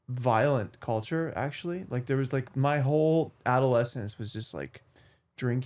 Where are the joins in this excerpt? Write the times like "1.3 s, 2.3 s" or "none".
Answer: none